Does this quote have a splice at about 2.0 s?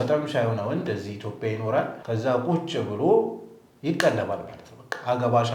yes; 1 cut; at 2.0 s

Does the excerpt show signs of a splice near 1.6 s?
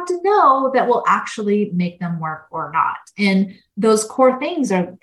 no; 1 cut; at 3.6 s

